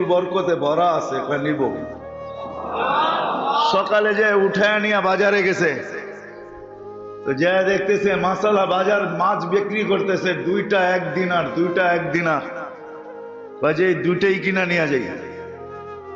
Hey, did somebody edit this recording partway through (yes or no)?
yes